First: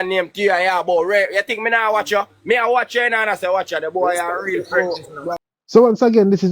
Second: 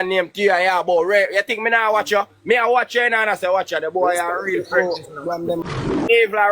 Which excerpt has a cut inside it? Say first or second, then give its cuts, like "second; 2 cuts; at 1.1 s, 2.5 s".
second; 1 cut; at 5.5 s